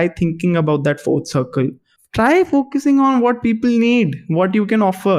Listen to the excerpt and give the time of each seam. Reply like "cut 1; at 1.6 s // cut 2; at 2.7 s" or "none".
cut 1; at 1.9 s